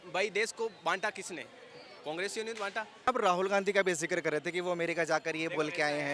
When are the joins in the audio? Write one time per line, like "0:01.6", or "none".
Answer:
0:03.1

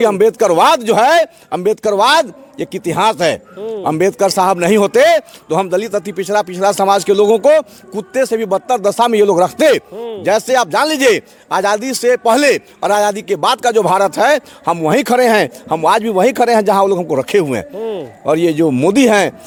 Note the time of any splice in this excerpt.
none

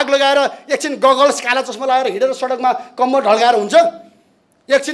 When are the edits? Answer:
none

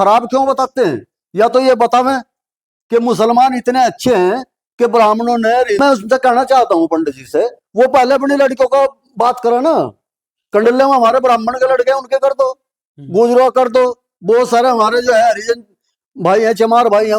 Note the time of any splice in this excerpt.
0:05.8

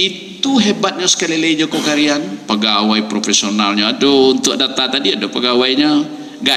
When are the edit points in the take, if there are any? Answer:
none

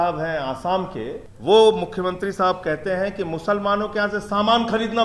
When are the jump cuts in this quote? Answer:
0:01.3

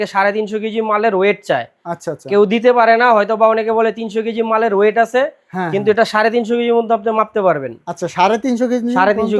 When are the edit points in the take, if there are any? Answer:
none

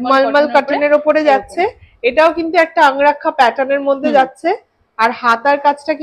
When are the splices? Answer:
none

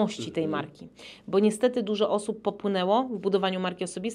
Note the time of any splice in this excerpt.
none

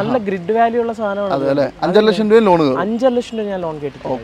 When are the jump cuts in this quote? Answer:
none

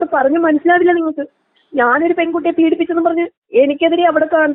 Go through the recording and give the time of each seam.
none

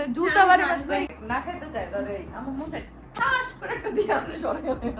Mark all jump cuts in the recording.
0:01.1

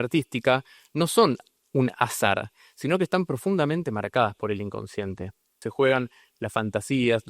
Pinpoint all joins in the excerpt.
0:05.6

